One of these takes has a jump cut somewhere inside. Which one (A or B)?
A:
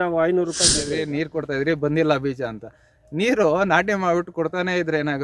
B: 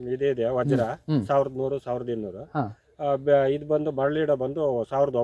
A